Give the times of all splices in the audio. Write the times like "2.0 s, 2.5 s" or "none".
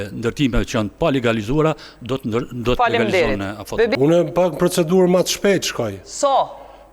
3.9 s